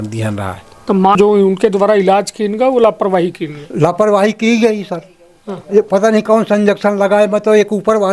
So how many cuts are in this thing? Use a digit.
1